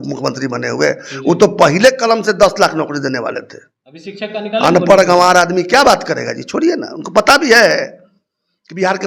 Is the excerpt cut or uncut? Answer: uncut